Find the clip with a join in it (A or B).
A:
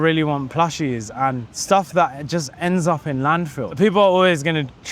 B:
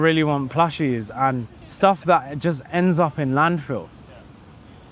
A